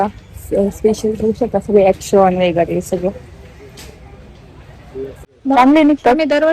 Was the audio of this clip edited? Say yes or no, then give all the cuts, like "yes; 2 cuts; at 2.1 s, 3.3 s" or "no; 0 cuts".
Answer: yes; 1 cut; at 5.3 s